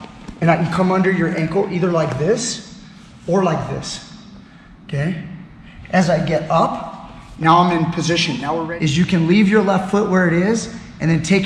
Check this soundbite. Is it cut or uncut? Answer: cut